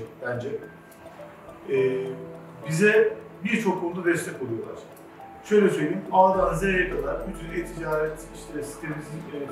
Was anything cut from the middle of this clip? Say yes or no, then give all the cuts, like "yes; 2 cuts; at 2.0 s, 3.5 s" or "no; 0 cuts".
no; 0 cuts